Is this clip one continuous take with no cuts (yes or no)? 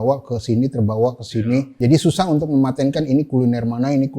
no